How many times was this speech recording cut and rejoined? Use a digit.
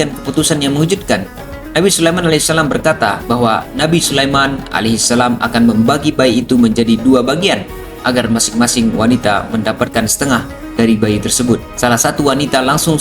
1